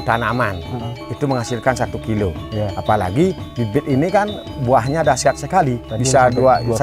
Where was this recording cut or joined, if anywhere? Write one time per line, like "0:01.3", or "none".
none